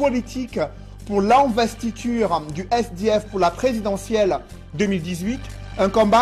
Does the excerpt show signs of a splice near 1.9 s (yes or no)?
yes